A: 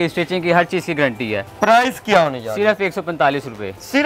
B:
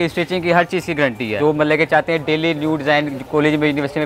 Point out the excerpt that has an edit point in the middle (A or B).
B